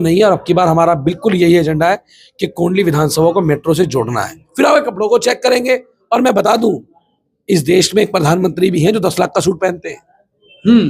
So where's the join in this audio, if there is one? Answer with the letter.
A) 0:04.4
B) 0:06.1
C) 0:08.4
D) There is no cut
A